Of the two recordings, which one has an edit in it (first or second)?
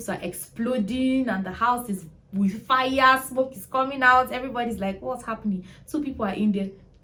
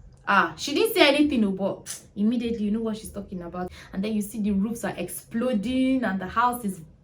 second